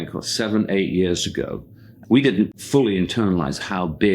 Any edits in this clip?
yes; 1 cut; at 2.5 s

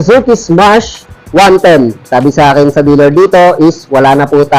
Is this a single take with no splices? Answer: no; 1 cut; at 2.0 s

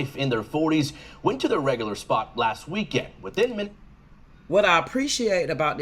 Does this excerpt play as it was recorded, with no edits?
yes; 0 cuts

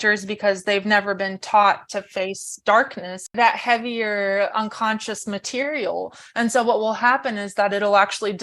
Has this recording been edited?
yes; 1 cut; at 3.3 s

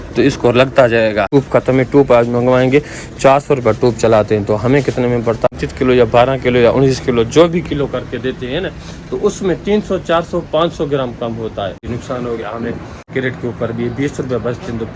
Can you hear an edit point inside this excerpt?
yes; 4 cuts; at 1.3 s, 5.6 s, 11.8 s, 13.1 s

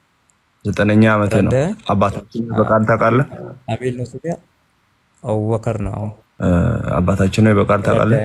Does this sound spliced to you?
yes; 1 cut; at 6.2 s

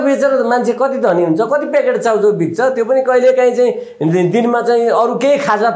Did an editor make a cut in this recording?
no; 0 cuts

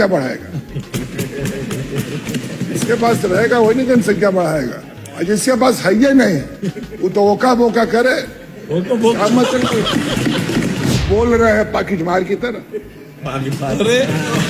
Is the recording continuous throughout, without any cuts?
no; 1 cut; at 11.0 s

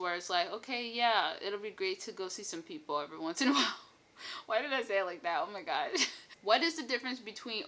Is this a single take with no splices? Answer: no; 1 cut; at 6.4 s

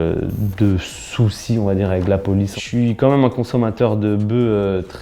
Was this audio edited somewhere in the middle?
yes; 1 cut; at 2.5 s

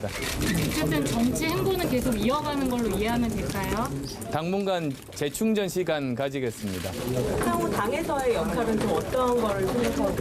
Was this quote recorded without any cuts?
no; 1 cut; at 1.7 s

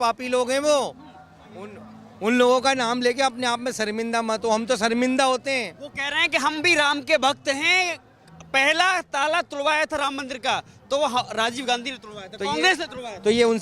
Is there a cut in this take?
no; 0 cuts

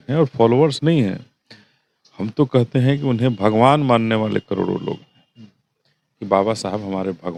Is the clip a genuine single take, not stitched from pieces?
yes; 0 cuts

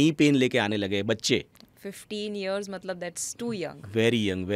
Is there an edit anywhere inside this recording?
no; 0 cuts

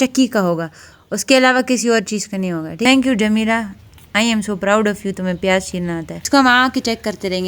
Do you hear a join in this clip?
yes; 2 cuts; at 2.8 s, 6.2 s

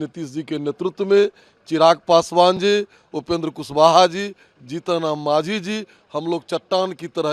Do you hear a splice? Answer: no; 0 cuts

